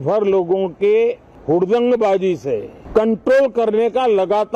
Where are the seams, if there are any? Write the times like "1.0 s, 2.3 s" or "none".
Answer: 1.3 s, 2.7 s